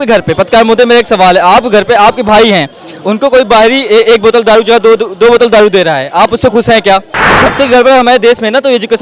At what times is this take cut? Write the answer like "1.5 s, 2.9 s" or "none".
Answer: 7.5 s